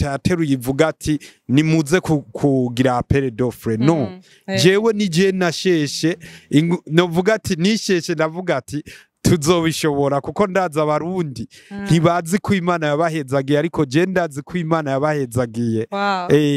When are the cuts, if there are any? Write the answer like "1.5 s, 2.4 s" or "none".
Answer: none